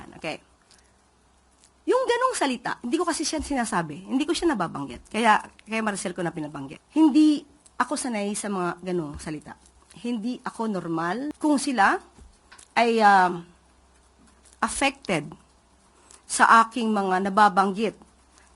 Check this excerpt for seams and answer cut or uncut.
cut